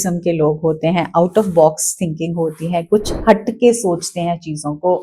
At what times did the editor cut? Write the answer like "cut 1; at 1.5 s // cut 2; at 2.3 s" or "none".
none